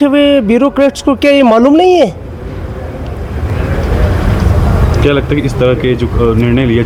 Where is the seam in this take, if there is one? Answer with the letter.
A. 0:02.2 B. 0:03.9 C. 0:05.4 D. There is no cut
D